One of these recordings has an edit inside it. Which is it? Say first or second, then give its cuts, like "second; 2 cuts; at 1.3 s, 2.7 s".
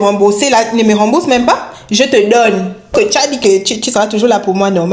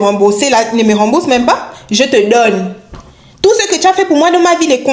first; 1 cut; at 2.9 s